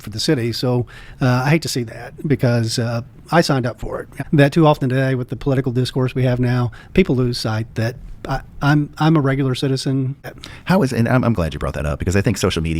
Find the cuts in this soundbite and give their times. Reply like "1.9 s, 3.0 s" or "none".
1.0 s, 4.1 s, 10.2 s